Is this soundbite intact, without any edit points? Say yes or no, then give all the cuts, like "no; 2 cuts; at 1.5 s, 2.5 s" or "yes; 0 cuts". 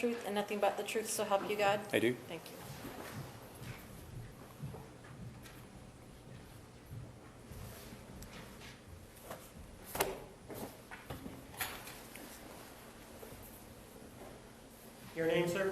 no; 1 cut; at 14.4 s